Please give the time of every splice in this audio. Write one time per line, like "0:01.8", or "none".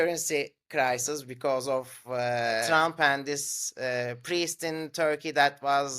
0:02.7